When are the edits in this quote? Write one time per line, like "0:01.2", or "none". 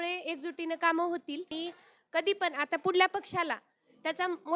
0:01.5